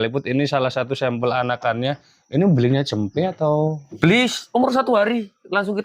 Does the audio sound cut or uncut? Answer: uncut